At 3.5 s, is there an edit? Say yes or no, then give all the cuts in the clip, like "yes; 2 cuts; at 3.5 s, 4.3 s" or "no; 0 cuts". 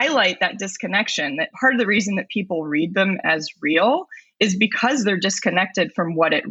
no; 0 cuts